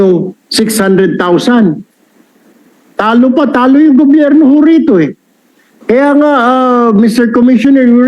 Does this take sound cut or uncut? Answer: uncut